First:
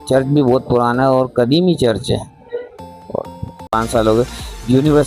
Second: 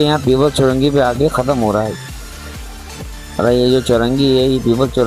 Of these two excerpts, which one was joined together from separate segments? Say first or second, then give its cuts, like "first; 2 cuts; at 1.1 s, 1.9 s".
first; 1 cut; at 3.7 s